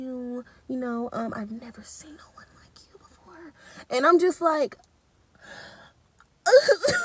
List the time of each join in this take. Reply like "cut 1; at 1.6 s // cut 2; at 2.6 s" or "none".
none